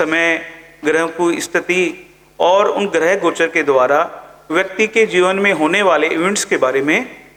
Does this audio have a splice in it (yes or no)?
no